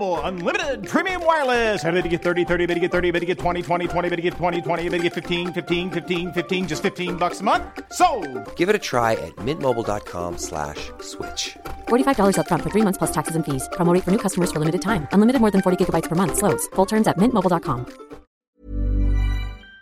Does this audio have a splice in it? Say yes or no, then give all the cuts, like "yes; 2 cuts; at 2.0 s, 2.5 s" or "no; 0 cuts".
yes; 1 cut; at 18.4 s